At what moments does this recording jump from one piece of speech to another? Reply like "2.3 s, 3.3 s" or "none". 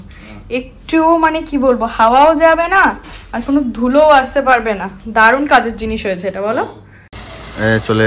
7.0 s